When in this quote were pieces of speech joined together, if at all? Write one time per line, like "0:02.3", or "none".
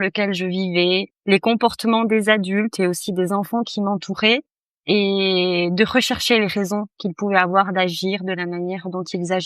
0:01.1

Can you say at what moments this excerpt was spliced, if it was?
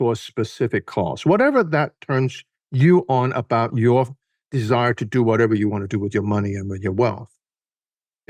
none

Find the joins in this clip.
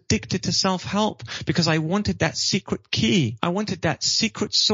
0:03.3

